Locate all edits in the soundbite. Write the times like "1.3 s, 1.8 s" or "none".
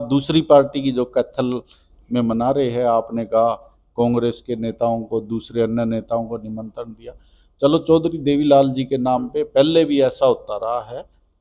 none